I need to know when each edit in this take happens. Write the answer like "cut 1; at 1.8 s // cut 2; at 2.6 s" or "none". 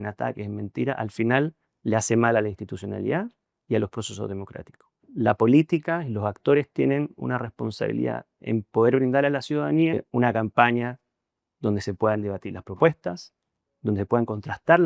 cut 1; at 5.0 s // cut 2; at 10.0 s